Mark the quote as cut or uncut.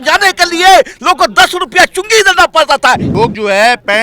cut